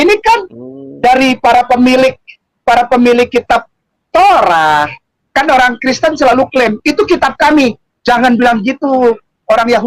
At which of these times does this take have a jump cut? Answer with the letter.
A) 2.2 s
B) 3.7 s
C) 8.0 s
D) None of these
D